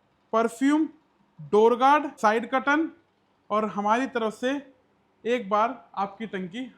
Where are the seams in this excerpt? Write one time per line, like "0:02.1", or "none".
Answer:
0:02.2